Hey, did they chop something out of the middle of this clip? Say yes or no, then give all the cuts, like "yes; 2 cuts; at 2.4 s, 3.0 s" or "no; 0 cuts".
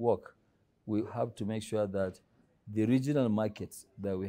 yes; 1 cut; at 1.1 s